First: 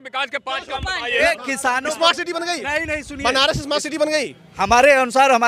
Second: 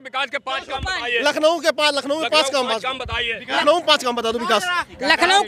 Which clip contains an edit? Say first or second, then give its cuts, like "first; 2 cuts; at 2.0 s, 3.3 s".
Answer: first; 1 cut; at 1.2 s